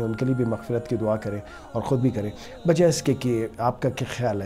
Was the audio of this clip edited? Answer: no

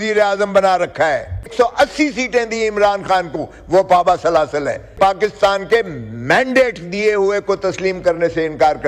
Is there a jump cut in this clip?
yes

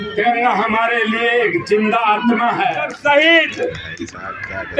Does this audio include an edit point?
yes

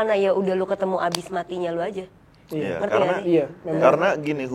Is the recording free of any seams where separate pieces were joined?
yes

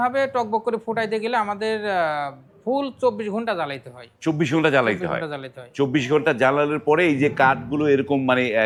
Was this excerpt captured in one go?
yes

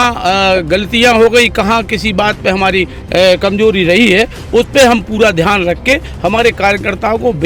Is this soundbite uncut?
yes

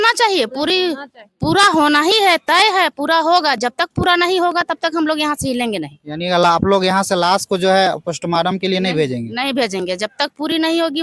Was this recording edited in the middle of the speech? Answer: no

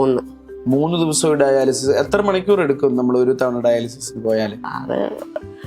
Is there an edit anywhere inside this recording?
no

